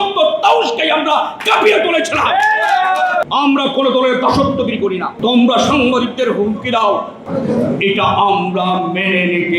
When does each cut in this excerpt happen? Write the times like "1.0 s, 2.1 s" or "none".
3.2 s, 5.1 s, 7.2 s